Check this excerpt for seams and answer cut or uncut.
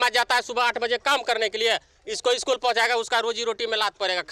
uncut